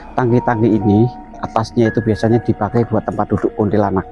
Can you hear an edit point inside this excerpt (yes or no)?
no